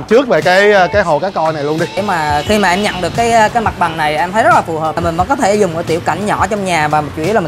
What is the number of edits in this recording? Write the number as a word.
two